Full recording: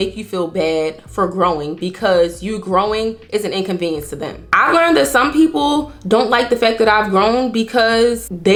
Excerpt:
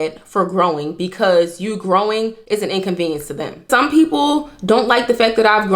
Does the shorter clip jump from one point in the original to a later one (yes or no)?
yes